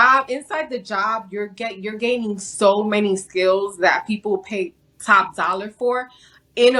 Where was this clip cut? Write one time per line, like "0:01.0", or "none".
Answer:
none